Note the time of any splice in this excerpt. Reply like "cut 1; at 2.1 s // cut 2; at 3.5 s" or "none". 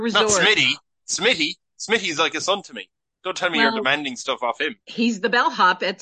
none